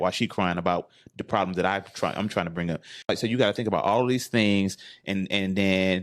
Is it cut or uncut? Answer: cut